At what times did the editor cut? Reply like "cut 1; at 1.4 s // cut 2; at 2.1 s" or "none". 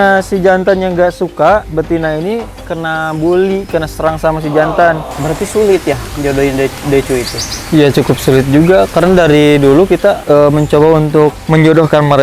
cut 1; at 1.7 s // cut 2; at 2.6 s // cut 3; at 5.1 s // cut 4; at 11.4 s